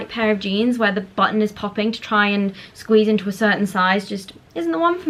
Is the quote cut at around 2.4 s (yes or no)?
no